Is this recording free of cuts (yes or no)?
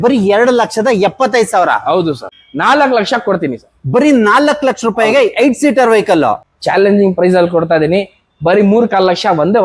no